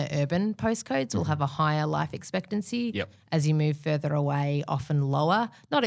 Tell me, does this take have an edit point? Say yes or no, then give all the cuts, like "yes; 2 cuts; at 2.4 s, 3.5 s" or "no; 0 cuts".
no; 0 cuts